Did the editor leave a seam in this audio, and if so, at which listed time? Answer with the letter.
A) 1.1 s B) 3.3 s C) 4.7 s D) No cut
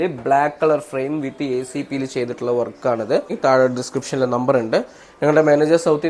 B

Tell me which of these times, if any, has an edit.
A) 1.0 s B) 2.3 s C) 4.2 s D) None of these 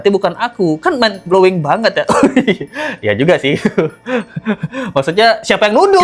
D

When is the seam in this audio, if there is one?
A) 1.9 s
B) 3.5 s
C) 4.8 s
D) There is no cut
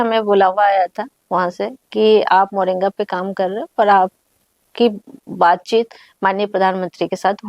D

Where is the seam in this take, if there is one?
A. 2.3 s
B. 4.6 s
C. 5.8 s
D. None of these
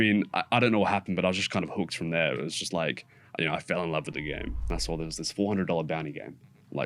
B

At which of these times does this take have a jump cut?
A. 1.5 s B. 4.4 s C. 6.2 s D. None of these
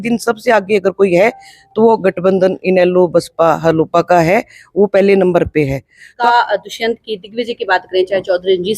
C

